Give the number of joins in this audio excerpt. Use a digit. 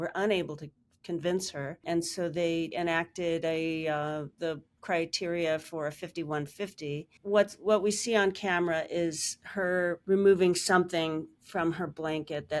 2